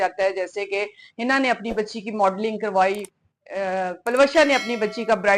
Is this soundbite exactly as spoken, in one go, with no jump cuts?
yes; 0 cuts

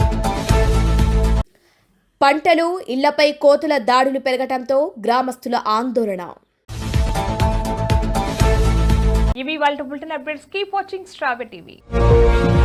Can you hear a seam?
no; 0 cuts

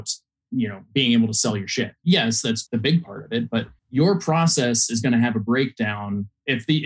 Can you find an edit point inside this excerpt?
yes; 3 cuts; at 2.0 s, 2.6 s, 3.8 s

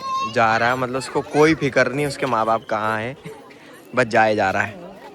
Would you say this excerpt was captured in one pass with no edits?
yes; 0 cuts

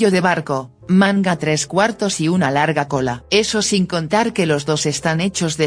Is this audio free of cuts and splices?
no; 1 cut; at 3.3 s

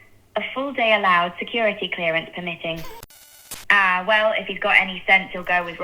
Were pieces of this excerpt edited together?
yes; 1 cut; at 3.0 s

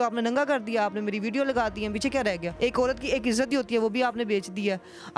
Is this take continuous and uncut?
no; 1 cut; at 2.5 s

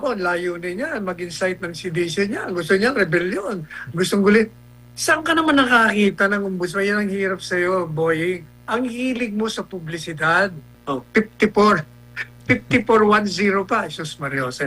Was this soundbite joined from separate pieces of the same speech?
yes; 1 cut; at 10.7 s

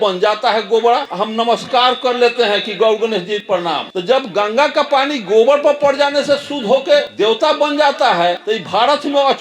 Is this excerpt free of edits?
no; 4 cuts; at 1.1 s, 3.6 s, 7.1 s, 8.4 s

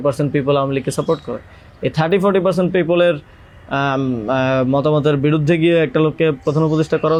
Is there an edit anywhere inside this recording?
no; 0 cuts

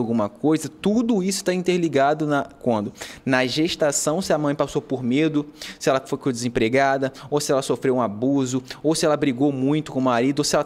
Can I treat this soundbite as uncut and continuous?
yes; 0 cuts

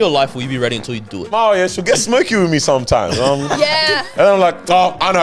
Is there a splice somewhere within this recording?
yes; 1 cut; at 1.3 s

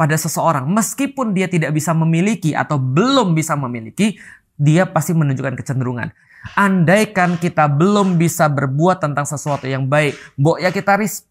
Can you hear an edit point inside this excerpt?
yes; 1 cut; at 6.2 s

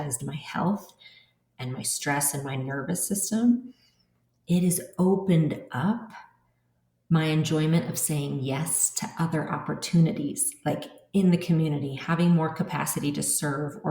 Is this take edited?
no; 0 cuts

